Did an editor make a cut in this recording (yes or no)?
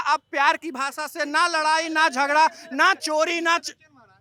no